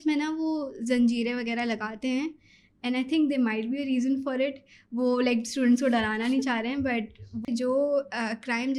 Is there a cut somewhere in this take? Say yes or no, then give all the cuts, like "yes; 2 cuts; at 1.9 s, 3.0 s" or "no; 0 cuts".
yes; 1 cut; at 7.4 s